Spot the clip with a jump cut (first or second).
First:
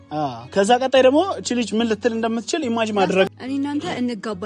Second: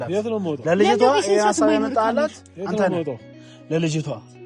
first